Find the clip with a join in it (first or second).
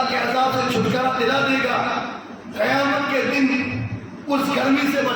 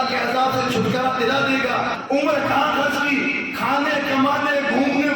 second